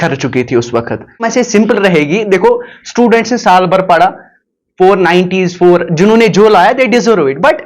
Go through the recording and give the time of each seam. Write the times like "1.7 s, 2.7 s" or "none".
1.3 s